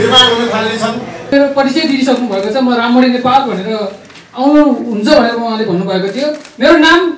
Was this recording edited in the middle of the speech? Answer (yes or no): yes